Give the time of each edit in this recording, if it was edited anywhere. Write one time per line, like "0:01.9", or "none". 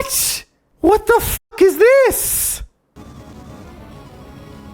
0:03.0

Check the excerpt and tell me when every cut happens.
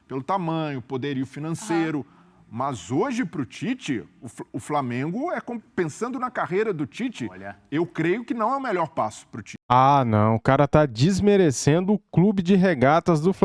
none

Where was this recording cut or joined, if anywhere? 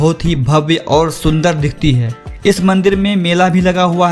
none

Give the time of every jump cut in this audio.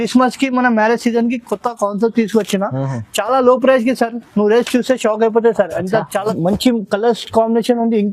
0:06.3

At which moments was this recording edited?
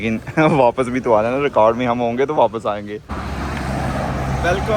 0:03.0

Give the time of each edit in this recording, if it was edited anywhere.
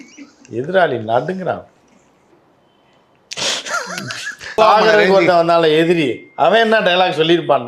0:02.3
0:04.6

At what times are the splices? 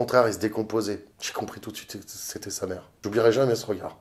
0:01.2
0:03.0

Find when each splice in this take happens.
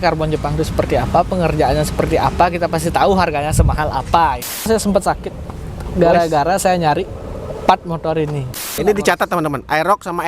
0:04.7
0:08.7

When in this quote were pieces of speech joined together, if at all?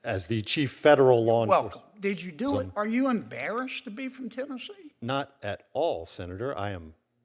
0:02.7

